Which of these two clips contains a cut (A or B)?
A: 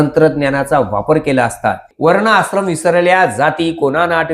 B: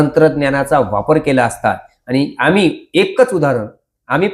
A